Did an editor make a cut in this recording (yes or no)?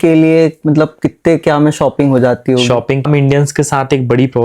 yes